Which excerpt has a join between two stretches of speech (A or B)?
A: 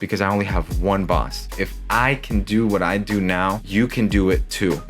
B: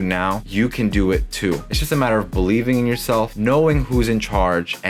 A